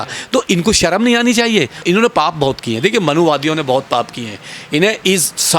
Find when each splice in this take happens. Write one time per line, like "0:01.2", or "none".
0:01.8